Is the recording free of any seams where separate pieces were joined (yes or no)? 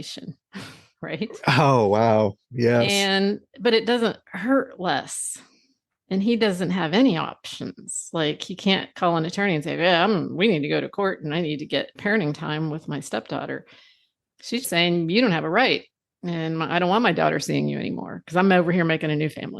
no